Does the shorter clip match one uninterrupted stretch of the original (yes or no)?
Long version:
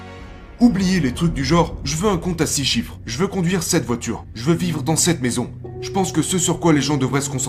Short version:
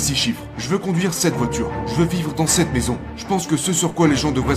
no